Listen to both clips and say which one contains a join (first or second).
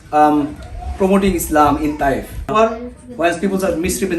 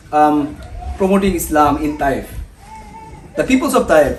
first